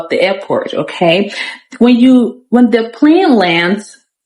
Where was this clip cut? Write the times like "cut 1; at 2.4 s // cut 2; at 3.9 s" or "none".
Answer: none

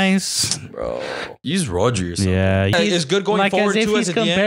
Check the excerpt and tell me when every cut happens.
cut 1; at 1.4 s // cut 2; at 2.7 s

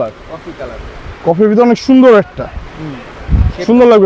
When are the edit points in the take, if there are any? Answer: none

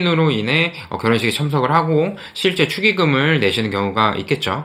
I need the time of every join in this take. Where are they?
none

